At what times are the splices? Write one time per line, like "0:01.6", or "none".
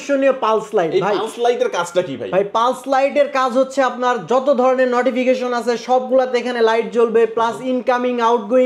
none